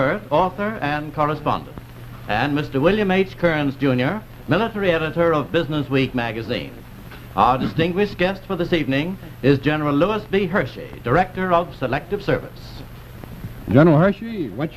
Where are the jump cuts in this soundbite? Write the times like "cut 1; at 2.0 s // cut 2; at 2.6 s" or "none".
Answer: cut 1; at 6.2 s